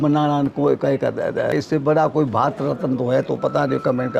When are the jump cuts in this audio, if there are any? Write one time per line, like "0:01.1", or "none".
0:01.5